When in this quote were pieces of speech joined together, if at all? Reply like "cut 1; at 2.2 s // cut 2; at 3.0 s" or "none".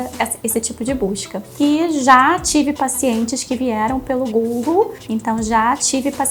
cut 1; at 1.5 s // cut 2; at 5.0 s